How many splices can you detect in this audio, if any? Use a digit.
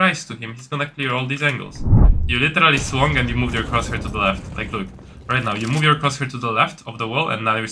1